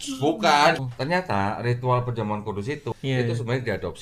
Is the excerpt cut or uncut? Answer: cut